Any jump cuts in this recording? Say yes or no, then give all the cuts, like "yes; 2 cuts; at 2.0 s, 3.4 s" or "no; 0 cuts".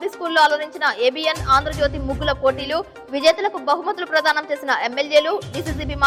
no; 0 cuts